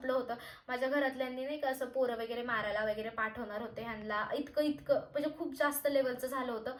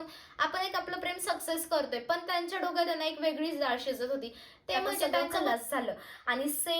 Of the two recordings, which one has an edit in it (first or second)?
second